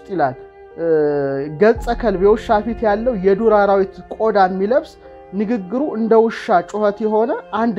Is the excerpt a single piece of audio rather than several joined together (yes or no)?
yes